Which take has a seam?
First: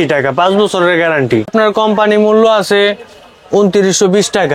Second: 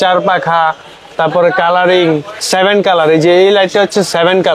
first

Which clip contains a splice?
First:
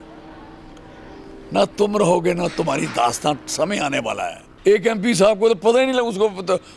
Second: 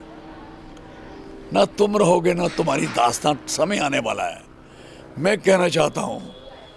first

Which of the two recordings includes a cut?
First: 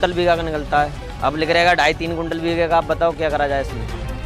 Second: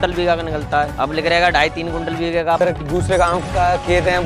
second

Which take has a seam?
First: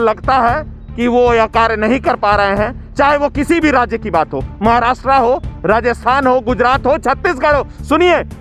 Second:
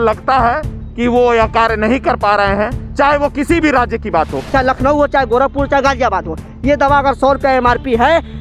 second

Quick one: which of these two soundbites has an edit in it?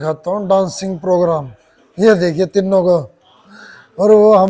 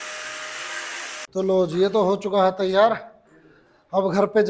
second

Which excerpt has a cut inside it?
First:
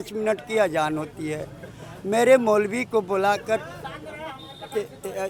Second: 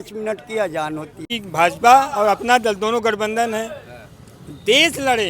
second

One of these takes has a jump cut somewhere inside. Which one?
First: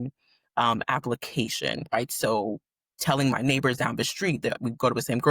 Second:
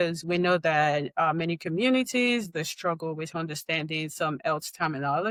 first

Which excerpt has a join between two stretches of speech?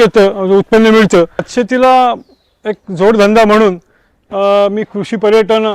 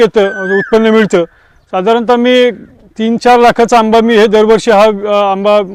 first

